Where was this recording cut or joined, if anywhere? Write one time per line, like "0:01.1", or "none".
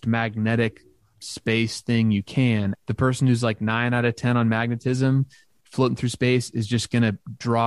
0:02.7